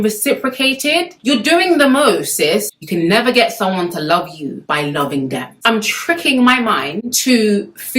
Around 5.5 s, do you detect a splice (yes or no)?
yes